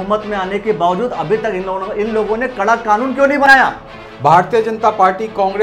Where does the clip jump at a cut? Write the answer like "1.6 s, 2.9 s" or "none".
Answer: 3.5 s